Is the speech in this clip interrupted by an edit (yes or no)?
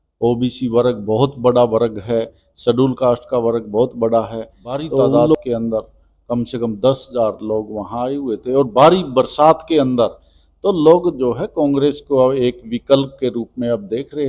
yes